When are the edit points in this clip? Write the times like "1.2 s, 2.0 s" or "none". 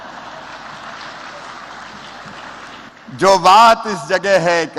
none